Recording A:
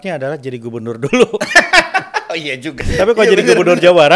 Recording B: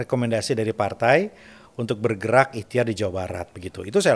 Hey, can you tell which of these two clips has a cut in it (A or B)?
A